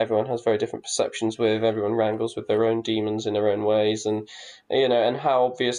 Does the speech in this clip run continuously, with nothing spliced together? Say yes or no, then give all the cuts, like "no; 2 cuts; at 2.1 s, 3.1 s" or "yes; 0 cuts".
yes; 0 cuts